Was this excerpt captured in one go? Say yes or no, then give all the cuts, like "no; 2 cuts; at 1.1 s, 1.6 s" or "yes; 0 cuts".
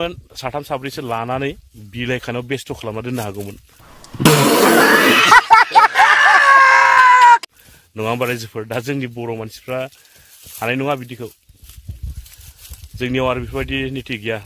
yes; 0 cuts